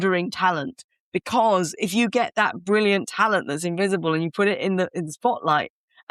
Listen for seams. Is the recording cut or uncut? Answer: uncut